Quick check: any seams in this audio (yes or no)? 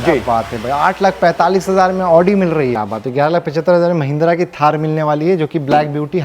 yes